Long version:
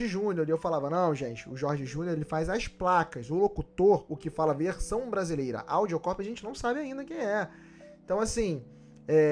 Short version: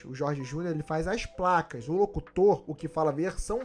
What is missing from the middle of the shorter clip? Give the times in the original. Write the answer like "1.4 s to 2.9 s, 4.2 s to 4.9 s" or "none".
none